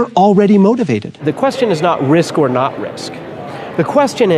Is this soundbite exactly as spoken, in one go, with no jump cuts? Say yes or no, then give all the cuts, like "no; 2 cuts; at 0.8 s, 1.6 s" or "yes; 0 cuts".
no; 1 cut; at 1.2 s